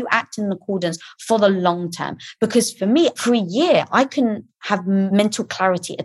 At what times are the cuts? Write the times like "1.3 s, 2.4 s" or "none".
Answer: 3.2 s, 5.1 s